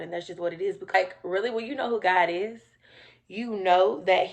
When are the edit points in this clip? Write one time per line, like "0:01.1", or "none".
0:00.9